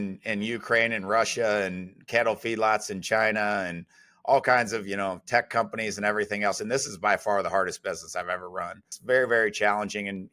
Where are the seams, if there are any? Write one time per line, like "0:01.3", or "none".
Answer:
0:08.9